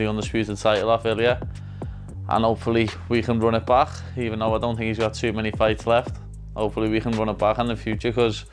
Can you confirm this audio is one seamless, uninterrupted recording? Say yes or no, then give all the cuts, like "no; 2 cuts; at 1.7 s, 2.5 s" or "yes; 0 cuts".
yes; 0 cuts